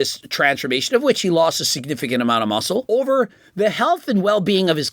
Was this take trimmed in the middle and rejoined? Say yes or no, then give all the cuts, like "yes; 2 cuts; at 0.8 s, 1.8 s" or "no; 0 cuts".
yes; 1 cut; at 2.8 s